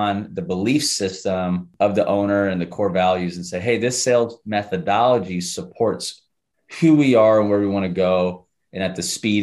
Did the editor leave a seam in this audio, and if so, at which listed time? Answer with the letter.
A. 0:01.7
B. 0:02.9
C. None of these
A